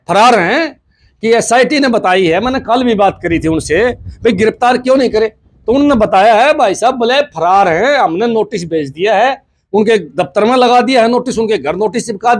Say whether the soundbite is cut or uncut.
uncut